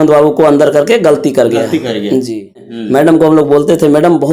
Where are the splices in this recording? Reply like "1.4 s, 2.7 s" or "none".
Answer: 2.8 s